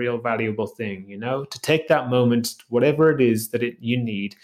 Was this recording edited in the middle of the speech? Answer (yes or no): no